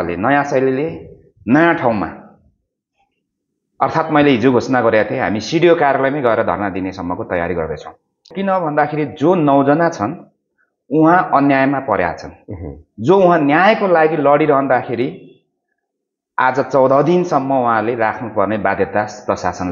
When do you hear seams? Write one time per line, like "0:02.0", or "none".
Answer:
0:08.3